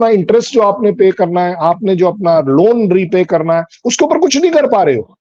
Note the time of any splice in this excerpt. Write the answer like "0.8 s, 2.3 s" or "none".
none